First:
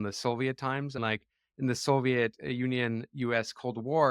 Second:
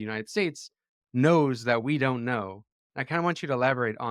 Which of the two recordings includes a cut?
first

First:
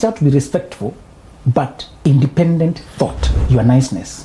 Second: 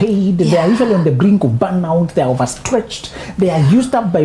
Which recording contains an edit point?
first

